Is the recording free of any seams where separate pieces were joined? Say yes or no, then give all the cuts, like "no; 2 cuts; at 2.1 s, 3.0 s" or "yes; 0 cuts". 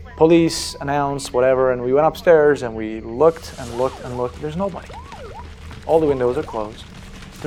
yes; 0 cuts